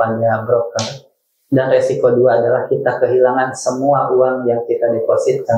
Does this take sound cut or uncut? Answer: uncut